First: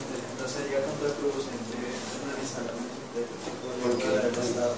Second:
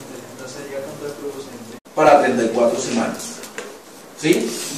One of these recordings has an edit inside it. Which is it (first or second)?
first